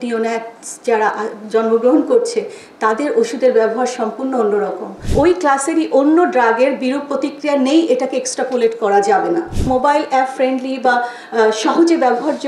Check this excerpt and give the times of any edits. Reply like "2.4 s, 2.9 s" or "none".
5.1 s, 9.7 s